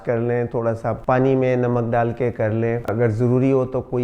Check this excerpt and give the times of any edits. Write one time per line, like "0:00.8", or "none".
0:02.9